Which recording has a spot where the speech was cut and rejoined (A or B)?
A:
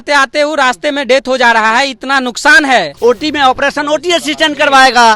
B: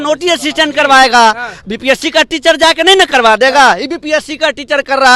A